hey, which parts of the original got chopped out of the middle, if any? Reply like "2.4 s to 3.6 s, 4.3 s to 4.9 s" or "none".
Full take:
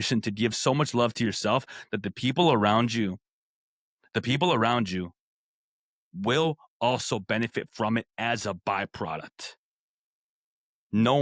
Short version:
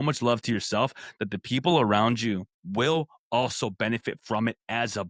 3.3 s to 6.0 s